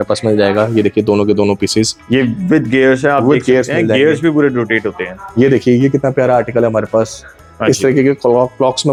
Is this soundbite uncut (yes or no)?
yes